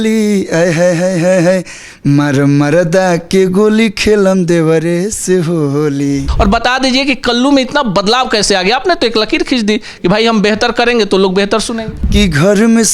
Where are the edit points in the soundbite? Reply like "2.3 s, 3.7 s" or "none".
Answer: 6.3 s, 11.9 s